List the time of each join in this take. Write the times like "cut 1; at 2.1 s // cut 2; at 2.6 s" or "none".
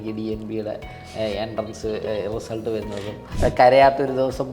cut 1; at 3.2 s